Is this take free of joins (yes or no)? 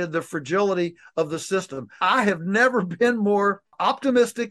no